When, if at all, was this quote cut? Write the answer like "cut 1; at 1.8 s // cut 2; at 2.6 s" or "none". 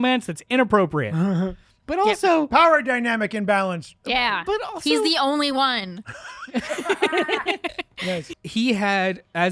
cut 1; at 8.3 s